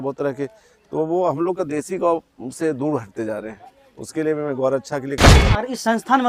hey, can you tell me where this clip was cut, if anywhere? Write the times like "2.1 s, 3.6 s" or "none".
5.4 s